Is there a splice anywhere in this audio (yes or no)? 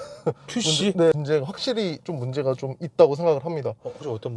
yes